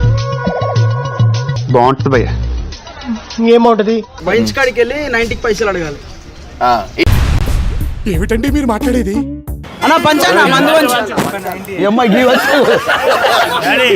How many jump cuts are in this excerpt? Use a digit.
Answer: 2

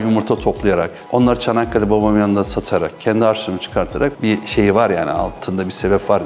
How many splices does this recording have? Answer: 1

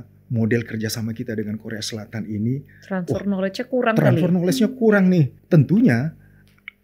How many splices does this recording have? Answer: 1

